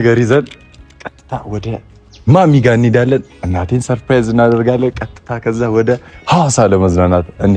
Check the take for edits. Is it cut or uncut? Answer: uncut